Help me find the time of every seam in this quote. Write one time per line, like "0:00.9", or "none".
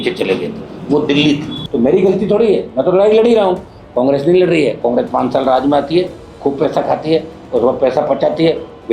0:01.6
0:03.8